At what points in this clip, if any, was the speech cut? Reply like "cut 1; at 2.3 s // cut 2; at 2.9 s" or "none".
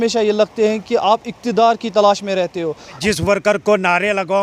cut 1; at 2.9 s